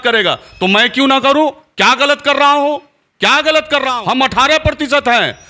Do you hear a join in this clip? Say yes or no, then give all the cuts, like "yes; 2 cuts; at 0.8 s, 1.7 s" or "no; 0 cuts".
yes; 1 cut; at 3.9 s